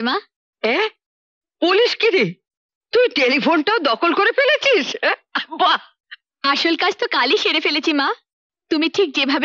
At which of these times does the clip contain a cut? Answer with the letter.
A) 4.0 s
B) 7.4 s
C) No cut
C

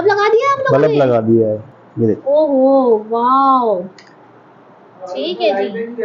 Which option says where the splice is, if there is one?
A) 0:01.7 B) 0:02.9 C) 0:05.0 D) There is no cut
A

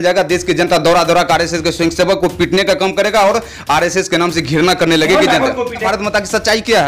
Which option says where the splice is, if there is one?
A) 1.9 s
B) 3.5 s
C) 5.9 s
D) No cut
C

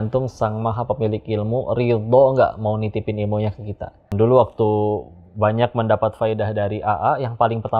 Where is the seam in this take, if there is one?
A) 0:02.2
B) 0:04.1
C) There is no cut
B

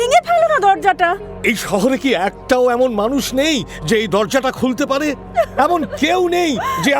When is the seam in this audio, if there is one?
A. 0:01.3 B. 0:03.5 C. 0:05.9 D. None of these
A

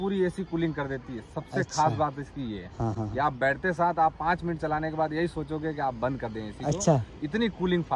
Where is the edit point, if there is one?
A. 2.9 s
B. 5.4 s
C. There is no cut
C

